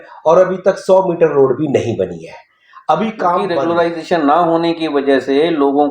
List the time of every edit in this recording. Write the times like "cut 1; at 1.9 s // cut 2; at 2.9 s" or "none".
cut 1; at 3.5 s